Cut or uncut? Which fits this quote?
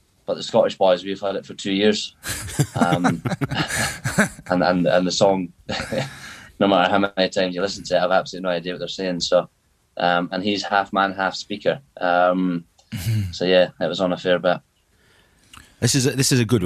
uncut